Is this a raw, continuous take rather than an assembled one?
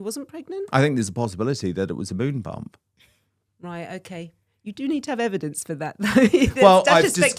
yes; 0 cuts

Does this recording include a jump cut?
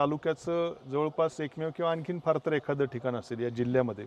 no; 0 cuts

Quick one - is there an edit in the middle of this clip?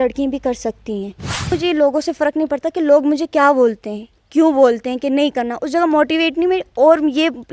yes; 1 cut; at 1.5 s

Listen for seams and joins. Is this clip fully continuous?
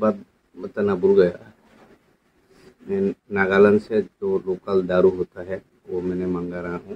yes; 0 cuts

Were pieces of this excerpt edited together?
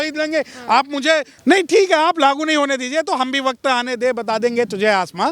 yes; 1 cut; at 1.3 s

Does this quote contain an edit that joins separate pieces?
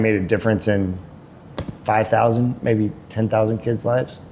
no; 0 cuts

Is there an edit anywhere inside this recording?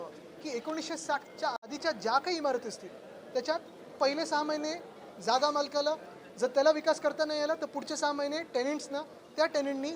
yes; 1 cut; at 1.4 s

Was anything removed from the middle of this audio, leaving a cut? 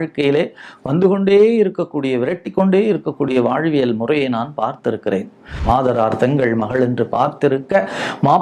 yes; 1 cut; at 5.6 s

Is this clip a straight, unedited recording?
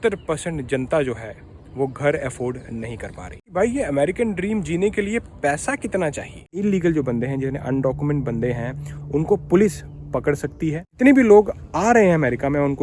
no; 3 cuts; at 3.5 s, 6.6 s, 10.8 s

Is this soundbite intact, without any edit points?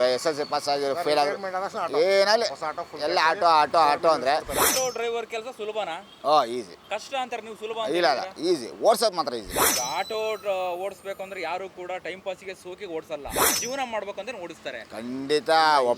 no; 4 cuts; at 4.7 s, 6.1 s, 6.8 s, 9.7 s

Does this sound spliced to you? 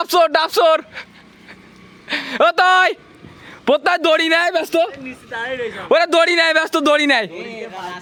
no; 0 cuts

